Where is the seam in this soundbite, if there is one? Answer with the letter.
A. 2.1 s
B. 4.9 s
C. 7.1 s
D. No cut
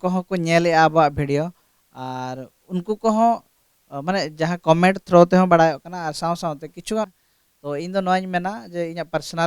C